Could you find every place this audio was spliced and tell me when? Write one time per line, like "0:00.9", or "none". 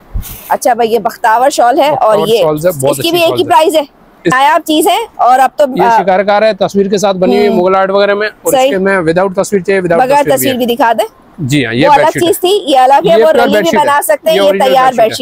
0:04.3
0:11.4